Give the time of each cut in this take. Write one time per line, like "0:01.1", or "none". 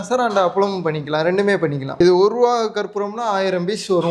0:02.0